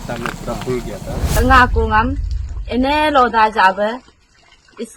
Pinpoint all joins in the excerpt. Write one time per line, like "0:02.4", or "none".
0:01.4